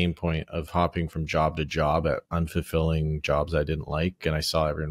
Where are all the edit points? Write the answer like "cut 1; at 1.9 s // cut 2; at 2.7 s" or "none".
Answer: none